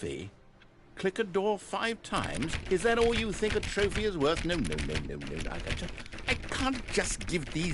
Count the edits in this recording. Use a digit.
0